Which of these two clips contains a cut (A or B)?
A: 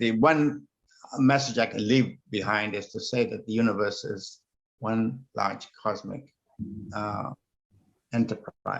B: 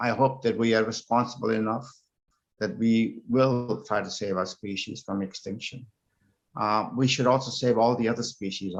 A